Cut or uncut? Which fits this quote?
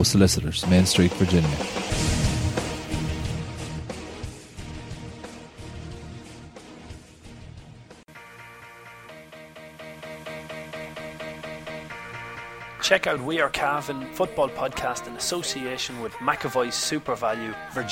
cut